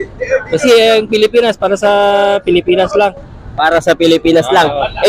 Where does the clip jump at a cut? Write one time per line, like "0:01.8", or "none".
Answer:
none